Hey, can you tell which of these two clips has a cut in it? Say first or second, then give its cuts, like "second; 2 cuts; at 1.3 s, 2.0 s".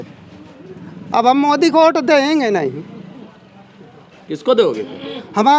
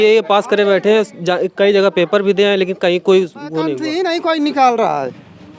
second; 1 cut; at 3.8 s